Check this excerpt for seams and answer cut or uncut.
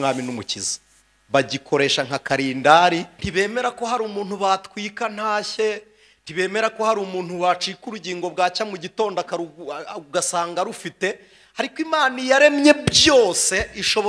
cut